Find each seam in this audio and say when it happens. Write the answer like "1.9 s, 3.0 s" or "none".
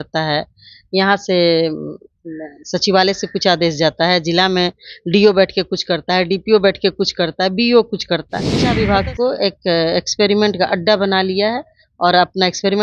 8.6 s